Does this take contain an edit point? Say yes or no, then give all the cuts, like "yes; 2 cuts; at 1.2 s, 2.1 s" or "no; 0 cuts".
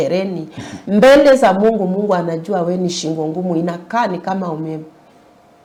no; 0 cuts